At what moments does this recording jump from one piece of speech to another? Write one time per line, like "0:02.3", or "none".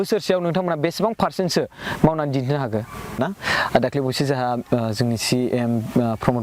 0:03.1